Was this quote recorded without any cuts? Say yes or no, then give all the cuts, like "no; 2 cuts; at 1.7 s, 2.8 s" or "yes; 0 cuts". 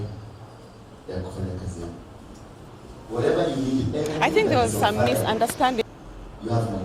no; 1 cut; at 2.7 s